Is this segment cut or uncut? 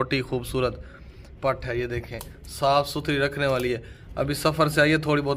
uncut